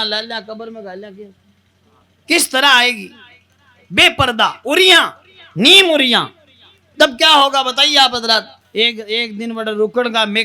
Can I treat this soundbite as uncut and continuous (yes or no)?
no